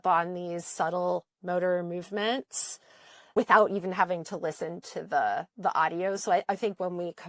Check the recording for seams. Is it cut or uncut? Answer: uncut